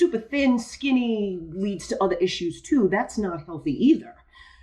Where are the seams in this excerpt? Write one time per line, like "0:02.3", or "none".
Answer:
none